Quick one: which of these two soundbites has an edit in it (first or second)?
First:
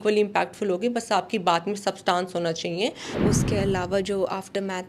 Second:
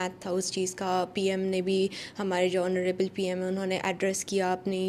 first